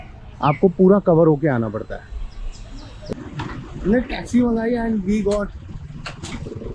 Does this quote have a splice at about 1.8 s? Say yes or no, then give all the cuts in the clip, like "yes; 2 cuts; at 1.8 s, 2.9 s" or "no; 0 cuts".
no; 1 cut; at 3.1 s